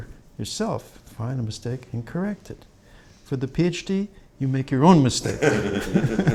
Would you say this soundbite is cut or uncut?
uncut